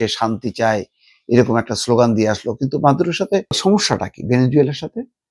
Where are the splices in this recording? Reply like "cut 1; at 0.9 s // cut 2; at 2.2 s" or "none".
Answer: cut 1; at 3.6 s